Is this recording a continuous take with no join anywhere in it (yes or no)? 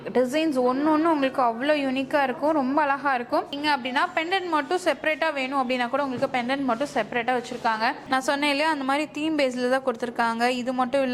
no